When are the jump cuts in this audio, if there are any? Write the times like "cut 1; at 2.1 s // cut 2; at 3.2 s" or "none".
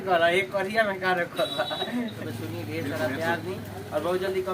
cut 1; at 2.2 s